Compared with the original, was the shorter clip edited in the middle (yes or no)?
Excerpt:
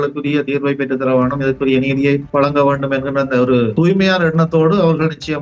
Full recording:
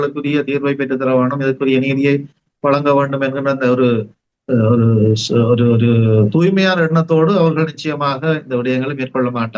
yes